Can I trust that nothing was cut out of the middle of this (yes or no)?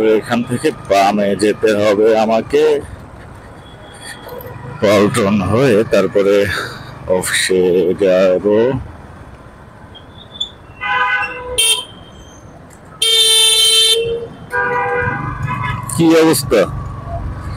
yes